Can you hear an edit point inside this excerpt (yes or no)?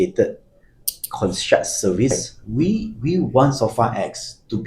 yes